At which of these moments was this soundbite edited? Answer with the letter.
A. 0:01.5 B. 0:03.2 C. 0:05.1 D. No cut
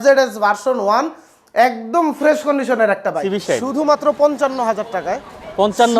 B